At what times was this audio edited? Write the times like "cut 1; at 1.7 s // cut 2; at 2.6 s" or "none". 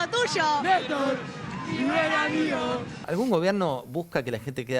cut 1; at 3.0 s